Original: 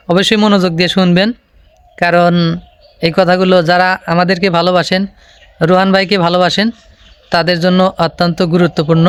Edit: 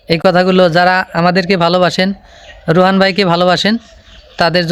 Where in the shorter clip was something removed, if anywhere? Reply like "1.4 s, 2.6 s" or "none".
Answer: none